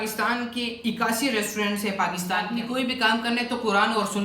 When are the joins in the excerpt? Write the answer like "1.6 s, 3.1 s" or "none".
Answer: 2.5 s